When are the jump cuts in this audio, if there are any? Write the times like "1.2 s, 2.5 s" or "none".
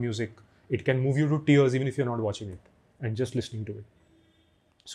none